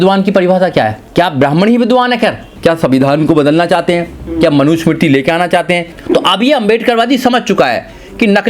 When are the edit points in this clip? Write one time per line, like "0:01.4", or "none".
0:01.0
0:02.5
0:05.9